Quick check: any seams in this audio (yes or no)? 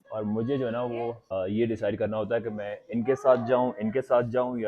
yes